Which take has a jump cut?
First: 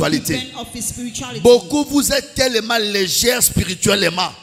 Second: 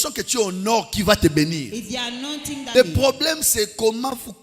second; 1 cut; at 2.6 s

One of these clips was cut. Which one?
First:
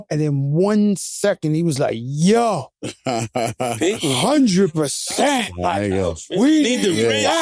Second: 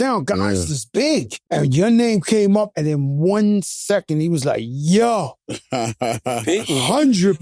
second; 1 cut; at 1.3 s

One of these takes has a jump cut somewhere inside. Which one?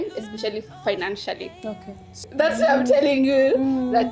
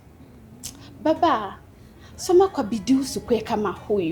first; 1 cut; at 2.3 s

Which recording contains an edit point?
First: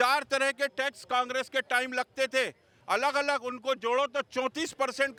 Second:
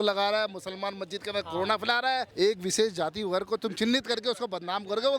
second; 1 cut; at 2.3 s

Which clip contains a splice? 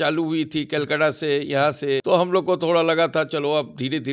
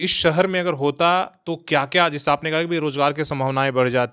first; 1 cut; at 2.0 s

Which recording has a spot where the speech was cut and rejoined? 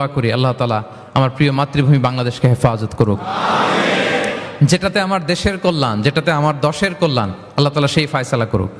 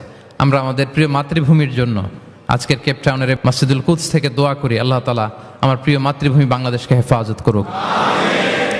second; 1 cut; at 3.4 s

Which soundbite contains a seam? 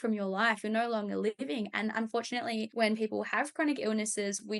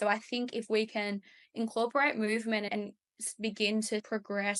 first; 1 cut; at 2.7 s

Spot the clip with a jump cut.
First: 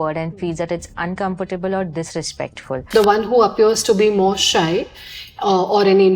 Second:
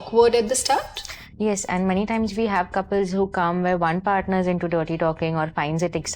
first; 1 cut; at 2.8 s

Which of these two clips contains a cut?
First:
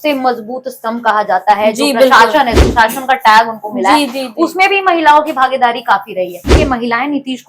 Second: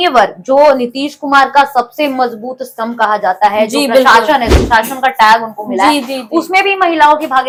first; 1 cut; at 6.5 s

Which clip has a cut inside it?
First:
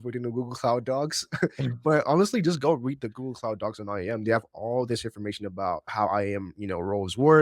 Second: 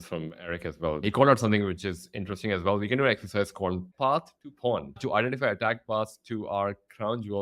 second; 3 cuts; at 1.0 s, 3.9 s, 4.9 s

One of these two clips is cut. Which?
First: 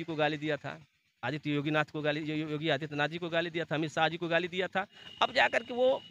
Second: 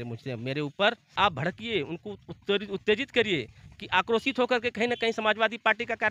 second; 1 cut; at 1.0 s

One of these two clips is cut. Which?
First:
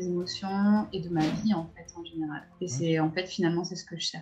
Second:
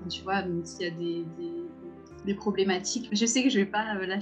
second; 1 cut; at 3.0 s

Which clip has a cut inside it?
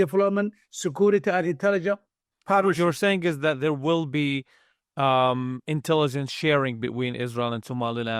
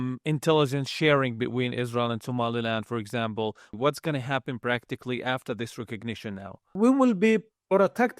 second; 2 cuts; at 3.7 s, 6.7 s

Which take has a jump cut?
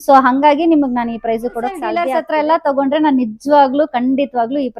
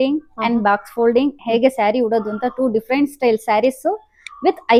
first; 1 cut; at 2.1 s

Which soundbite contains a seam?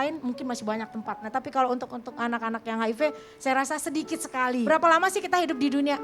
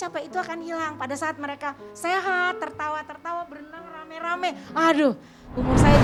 first; 2 cuts; at 1.3 s, 4.7 s

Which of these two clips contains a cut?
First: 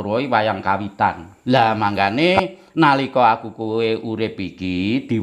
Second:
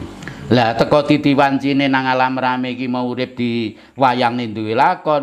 first; 1 cut; at 1.3 s

